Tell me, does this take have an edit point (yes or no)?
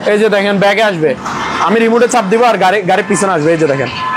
no